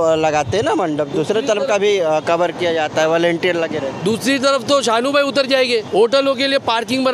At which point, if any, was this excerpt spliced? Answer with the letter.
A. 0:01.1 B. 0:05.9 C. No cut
B